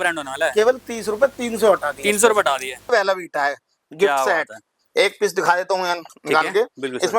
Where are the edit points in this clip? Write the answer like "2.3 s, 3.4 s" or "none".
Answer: 2.9 s